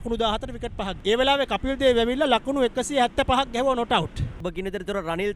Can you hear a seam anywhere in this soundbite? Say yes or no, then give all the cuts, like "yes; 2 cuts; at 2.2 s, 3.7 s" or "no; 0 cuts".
yes; 2 cuts; at 0.9 s, 4.4 s